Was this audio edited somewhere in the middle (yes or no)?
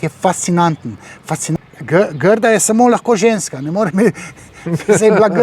yes